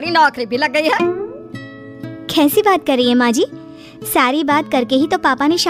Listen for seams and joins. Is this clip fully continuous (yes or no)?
yes